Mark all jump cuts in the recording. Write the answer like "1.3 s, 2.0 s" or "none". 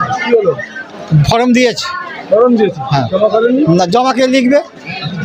none